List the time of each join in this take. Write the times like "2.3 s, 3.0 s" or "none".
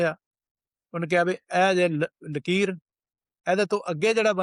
none